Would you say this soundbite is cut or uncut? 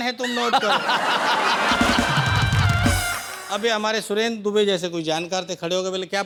uncut